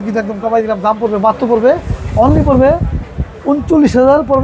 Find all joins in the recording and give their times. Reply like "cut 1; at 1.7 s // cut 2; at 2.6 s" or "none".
none